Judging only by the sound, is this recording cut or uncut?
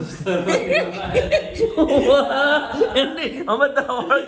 uncut